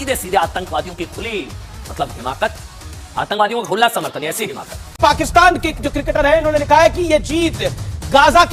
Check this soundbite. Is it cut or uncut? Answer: cut